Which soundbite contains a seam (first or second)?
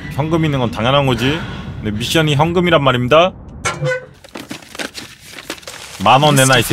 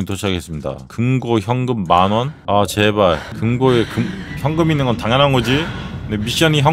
second